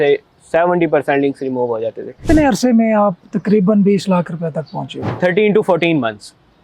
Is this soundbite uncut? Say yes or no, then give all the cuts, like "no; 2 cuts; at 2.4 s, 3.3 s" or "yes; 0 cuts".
no; 2 cuts; at 2.2 s, 5.0 s